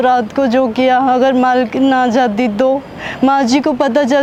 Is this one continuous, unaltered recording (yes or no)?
yes